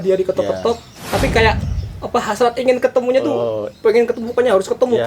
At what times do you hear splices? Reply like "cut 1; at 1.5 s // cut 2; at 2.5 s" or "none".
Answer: cut 1; at 0.9 s